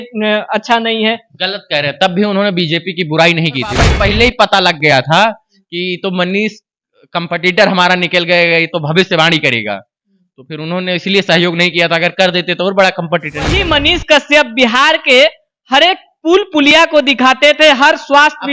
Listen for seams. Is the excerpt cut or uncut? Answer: cut